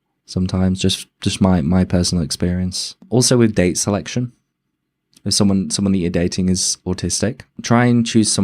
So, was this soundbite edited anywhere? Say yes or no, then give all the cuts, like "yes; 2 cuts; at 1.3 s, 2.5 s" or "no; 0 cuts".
yes; 1 cut; at 2.9 s